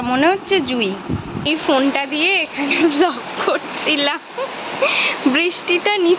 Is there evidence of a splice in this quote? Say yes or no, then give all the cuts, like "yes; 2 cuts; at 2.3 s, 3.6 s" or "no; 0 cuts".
yes; 1 cut; at 1.5 s